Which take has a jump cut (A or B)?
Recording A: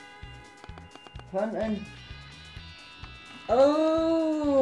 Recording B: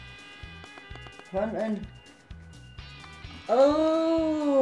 B